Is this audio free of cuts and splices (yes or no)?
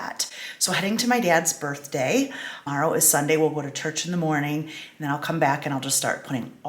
no